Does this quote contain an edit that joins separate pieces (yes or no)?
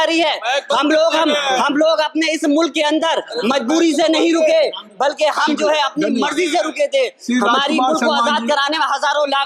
no